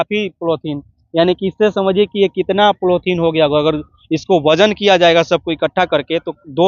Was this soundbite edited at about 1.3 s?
no; 0 cuts

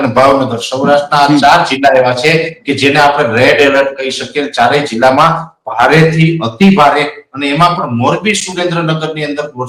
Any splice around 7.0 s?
no; 0 cuts

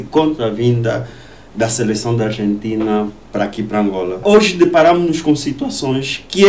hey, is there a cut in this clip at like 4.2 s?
yes; 1 cut; at 4.2 s

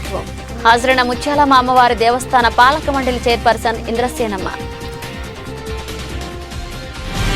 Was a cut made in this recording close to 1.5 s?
no; 2 cuts; at 4.7 s, 6.4 s

